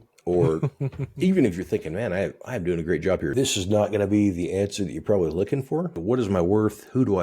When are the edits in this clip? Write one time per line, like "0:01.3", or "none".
0:03.3
0:05.9